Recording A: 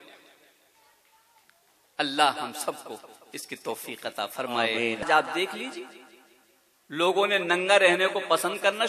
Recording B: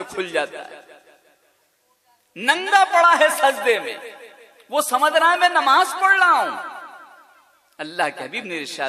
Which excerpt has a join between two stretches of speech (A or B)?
A